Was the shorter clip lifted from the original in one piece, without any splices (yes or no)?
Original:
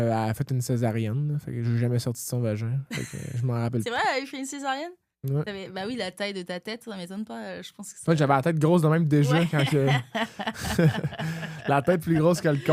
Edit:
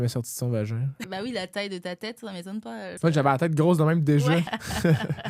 no